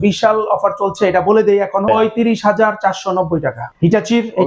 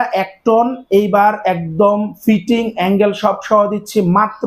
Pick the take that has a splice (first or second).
first